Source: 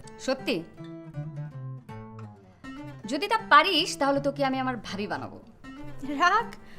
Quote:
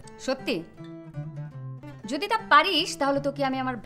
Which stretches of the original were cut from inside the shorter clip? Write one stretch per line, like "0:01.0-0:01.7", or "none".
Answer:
0:01.8-0:02.8